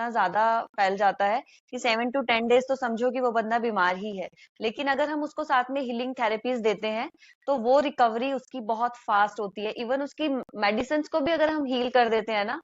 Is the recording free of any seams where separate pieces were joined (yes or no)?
yes